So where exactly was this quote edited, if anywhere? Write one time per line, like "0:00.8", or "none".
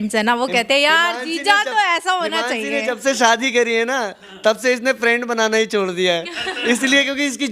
none